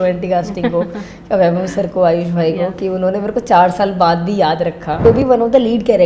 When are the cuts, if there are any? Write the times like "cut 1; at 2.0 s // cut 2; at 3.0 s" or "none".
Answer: cut 1; at 5.0 s